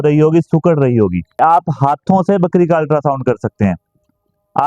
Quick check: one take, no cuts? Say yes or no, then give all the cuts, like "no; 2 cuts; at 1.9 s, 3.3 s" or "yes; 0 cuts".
no; 1 cut; at 1.4 s